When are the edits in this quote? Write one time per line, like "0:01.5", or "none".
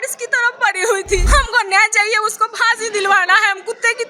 0:01.2